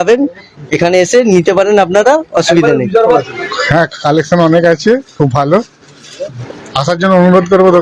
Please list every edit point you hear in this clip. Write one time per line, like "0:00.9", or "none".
0:03.1
0:06.3